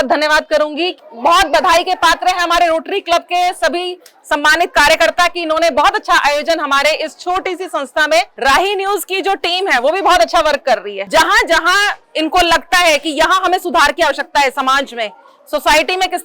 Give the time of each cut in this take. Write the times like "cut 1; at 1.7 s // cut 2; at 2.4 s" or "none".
cut 1; at 1.0 s // cut 2; at 8.3 s // cut 3; at 11.0 s